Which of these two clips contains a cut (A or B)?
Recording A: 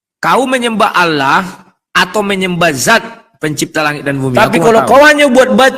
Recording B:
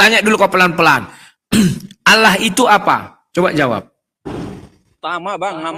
A